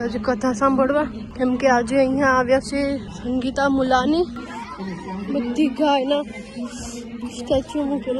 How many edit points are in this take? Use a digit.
0